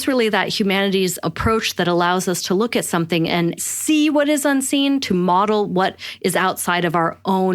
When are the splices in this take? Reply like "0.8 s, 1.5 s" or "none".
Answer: 1.2 s, 3.6 s